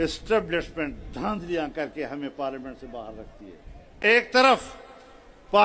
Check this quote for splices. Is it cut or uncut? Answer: cut